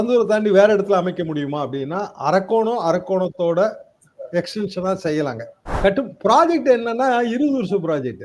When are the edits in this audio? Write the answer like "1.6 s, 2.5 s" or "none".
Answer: 5.7 s